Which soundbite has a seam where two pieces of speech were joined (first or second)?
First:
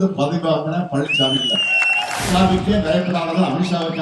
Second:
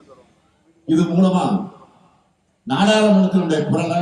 first